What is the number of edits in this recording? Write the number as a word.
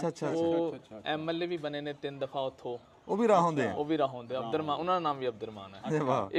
zero